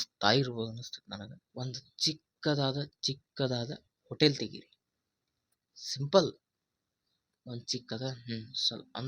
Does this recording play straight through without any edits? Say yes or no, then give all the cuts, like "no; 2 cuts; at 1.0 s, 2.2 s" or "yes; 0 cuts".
no; 1 cut; at 1.4 s